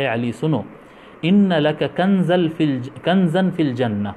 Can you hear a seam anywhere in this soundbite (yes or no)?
no